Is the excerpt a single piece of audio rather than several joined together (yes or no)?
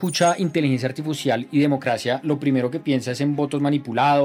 yes